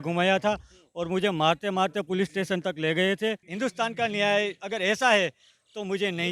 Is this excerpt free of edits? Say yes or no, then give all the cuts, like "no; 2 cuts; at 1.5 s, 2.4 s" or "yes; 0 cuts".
no; 1 cut; at 3.5 s